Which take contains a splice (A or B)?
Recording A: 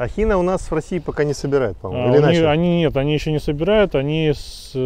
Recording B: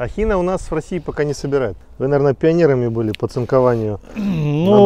B